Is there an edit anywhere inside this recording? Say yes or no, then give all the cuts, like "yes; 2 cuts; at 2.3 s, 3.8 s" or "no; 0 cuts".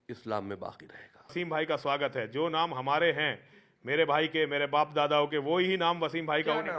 yes; 1 cut; at 1.3 s